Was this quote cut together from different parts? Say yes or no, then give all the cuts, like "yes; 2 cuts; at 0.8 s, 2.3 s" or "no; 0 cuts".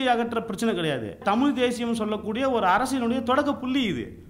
yes; 1 cut; at 1.2 s